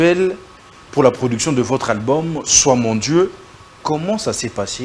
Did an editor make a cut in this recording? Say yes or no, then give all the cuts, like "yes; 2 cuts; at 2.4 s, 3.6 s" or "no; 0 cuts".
no; 0 cuts